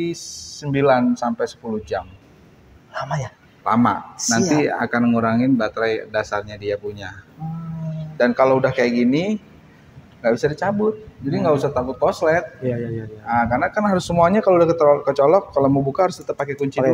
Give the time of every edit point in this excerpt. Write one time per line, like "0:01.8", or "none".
none